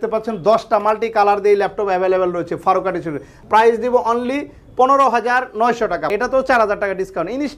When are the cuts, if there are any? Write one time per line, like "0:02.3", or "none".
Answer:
0:03.3
0:06.1